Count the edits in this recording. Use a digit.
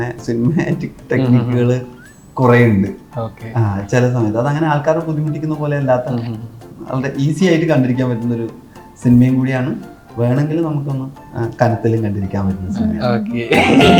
0